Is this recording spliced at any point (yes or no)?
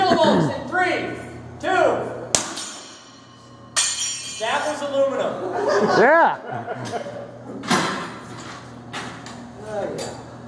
no